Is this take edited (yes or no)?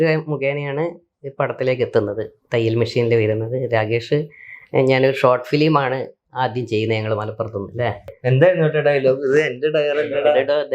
yes